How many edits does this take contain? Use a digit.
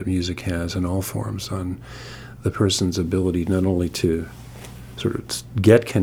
0